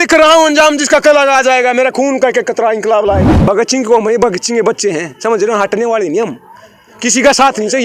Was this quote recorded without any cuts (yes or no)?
no